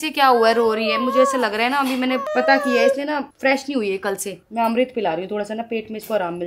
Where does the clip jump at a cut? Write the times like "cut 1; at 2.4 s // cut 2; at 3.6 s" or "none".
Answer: none